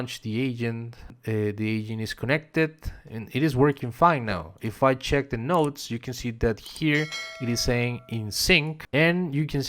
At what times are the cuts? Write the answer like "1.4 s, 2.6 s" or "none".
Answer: 1.1 s, 8.8 s